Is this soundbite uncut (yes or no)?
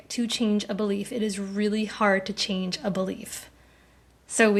yes